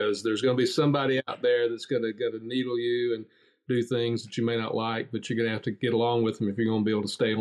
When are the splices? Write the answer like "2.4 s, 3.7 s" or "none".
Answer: none